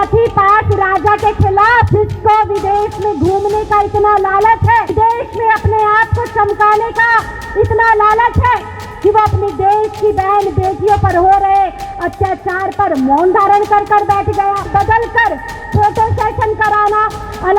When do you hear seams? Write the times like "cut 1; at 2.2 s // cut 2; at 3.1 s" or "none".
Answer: cut 1; at 1.9 s // cut 2; at 4.9 s // cut 3; at 14.7 s